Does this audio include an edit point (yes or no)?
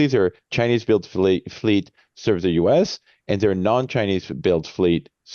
no